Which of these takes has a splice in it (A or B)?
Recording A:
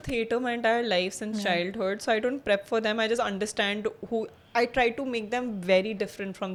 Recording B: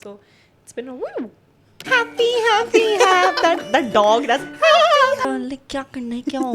B